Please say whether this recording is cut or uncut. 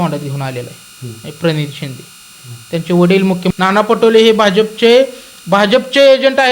cut